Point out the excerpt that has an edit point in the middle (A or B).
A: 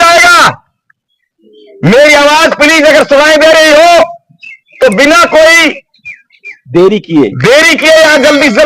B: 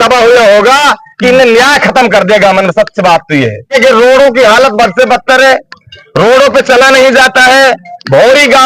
B